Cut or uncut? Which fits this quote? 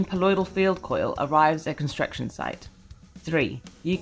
cut